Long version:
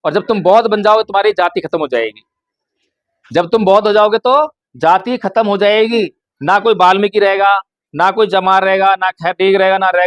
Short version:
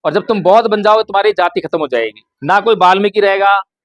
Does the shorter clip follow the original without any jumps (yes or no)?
no